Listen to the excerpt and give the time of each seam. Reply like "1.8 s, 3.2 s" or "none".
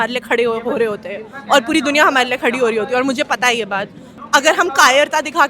4.1 s